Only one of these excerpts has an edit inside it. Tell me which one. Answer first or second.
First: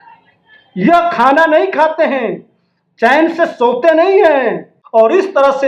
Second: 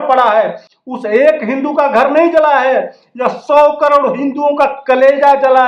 first